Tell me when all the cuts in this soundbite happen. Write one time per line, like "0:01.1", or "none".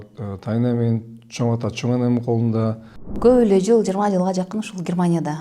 0:03.1